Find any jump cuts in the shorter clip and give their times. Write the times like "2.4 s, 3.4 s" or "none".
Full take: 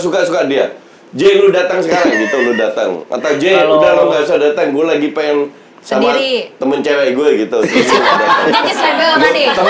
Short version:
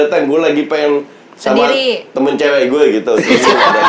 none